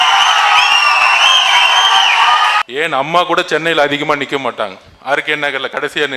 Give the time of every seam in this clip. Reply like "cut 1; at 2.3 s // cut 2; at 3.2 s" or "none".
cut 1; at 2.6 s